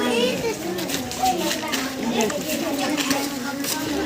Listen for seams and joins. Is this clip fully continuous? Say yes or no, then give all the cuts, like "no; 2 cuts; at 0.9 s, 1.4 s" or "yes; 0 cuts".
yes; 0 cuts